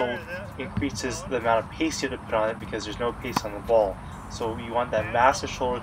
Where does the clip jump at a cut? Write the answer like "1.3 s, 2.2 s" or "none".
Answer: none